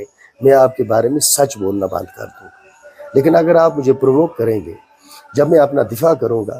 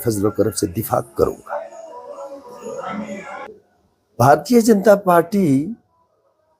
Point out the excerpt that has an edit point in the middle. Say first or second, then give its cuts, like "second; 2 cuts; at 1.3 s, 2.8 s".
second; 1 cut; at 3.5 s